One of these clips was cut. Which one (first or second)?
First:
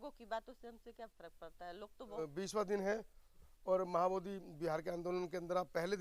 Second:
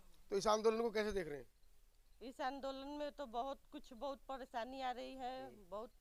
first